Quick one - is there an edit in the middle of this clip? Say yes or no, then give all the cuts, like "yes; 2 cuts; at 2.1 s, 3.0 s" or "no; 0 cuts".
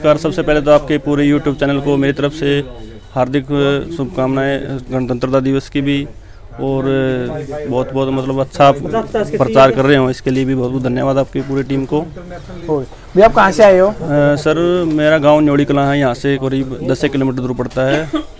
no; 0 cuts